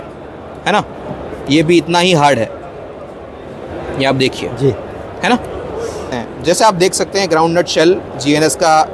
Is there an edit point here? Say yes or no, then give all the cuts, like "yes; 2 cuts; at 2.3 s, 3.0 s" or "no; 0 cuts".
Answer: yes; 1 cut; at 6.1 s